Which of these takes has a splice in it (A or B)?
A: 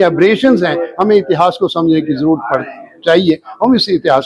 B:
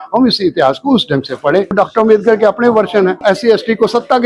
B